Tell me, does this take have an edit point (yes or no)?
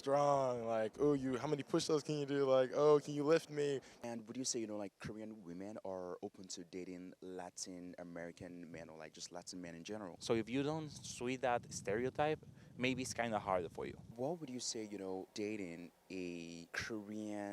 yes